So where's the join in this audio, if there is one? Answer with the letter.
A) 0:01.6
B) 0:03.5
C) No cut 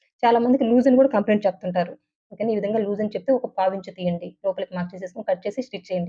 C